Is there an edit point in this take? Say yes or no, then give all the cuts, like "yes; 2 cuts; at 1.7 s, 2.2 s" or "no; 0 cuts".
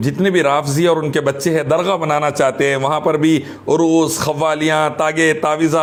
no; 0 cuts